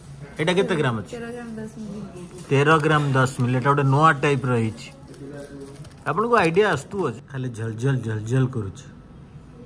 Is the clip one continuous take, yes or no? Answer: no